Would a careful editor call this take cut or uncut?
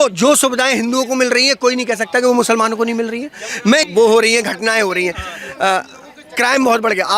cut